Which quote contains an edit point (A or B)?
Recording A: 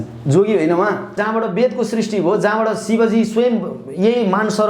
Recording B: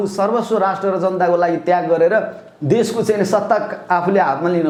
A